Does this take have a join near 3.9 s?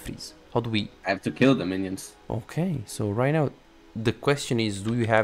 no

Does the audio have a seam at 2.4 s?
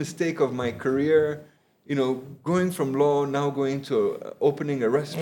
no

